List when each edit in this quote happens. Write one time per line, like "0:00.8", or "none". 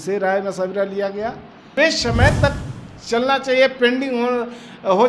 0:01.7

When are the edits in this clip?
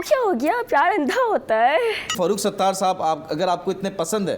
0:02.1

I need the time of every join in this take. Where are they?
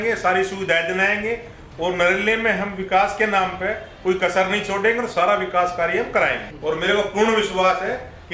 0:06.5

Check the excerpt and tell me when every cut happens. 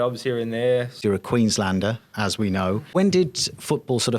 0:00.9
0:02.9

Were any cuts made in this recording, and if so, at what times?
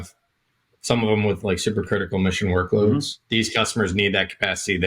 0:03.2

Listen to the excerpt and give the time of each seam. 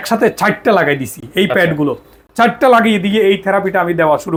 none

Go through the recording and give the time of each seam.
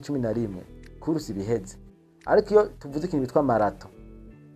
0:02.4

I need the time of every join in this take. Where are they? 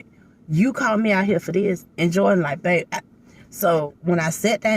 0:03.9

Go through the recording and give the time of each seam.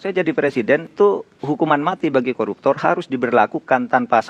0:00.9

